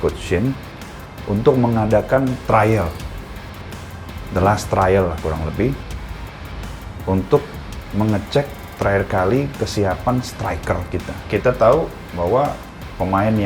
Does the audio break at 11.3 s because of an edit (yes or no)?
yes